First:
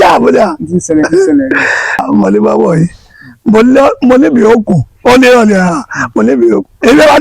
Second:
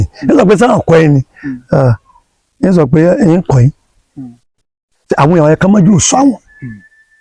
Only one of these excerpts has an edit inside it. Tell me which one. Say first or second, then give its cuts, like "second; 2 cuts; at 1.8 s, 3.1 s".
first; 1 cut; at 2.0 s